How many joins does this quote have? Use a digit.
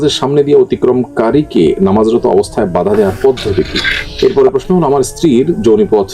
1